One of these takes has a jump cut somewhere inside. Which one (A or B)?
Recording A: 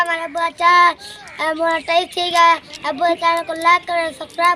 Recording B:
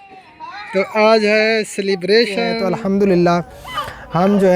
B